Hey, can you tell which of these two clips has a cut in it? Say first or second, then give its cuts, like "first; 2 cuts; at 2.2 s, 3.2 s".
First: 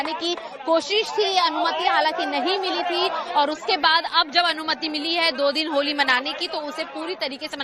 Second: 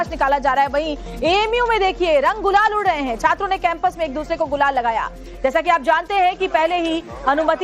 second; 1 cut; at 6.1 s